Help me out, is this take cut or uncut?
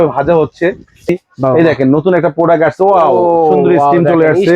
cut